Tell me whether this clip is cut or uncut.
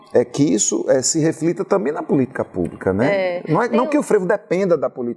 uncut